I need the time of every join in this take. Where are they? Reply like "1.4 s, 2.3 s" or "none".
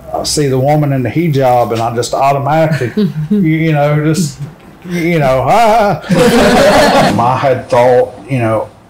7.1 s